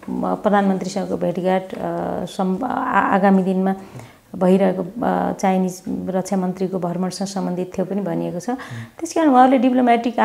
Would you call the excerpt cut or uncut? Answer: uncut